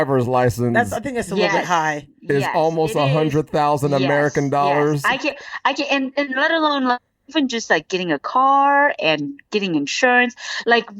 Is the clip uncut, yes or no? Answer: yes